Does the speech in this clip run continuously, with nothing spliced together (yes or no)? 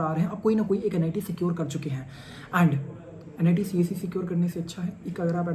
yes